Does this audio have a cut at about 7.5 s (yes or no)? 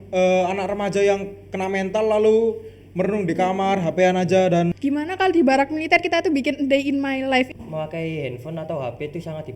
yes